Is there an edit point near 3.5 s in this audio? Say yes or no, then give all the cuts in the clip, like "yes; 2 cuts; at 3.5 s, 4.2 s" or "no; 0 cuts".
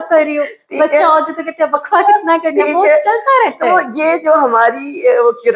no; 0 cuts